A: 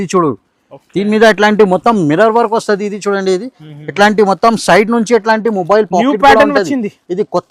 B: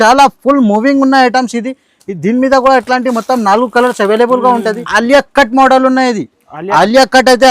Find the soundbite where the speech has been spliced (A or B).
B